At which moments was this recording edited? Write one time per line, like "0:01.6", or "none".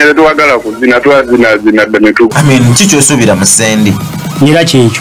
0:02.3